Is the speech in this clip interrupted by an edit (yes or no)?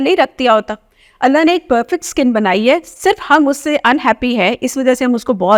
no